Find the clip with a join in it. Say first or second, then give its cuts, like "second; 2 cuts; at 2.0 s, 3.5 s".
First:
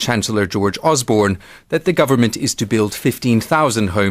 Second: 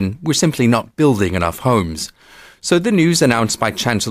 first; 1 cut; at 3.0 s